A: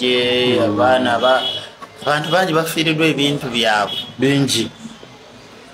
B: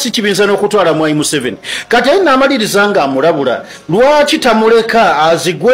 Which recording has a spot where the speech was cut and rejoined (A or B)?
A